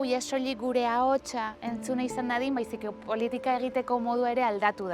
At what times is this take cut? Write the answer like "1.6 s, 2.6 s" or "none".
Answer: none